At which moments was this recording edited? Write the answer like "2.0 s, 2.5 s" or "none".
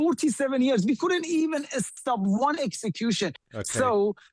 3.4 s